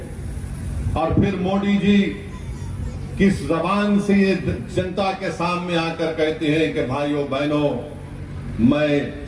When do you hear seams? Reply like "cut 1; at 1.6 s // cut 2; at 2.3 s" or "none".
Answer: none